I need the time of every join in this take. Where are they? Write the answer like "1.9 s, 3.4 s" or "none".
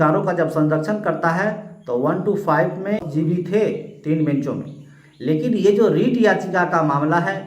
3.1 s